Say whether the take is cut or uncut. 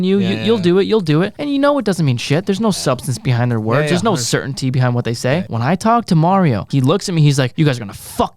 cut